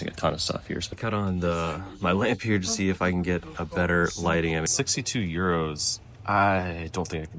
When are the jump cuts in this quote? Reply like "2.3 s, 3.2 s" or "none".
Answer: 0.9 s, 4.7 s